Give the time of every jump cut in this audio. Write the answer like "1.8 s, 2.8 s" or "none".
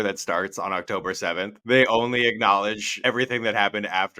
2.9 s